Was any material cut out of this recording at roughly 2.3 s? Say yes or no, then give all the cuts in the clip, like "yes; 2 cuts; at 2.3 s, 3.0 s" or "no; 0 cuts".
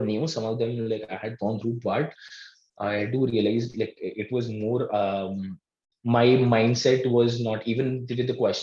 no; 0 cuts